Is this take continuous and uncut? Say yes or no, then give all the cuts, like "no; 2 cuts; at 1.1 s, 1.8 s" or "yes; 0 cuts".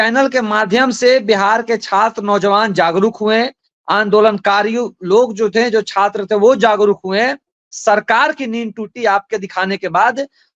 yes; 0 cuts